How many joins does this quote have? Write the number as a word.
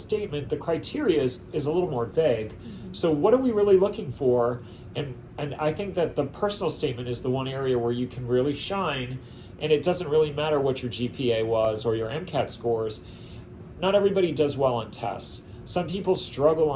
zero